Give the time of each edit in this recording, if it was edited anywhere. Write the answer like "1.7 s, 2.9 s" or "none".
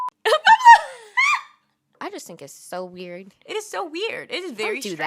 2.0 s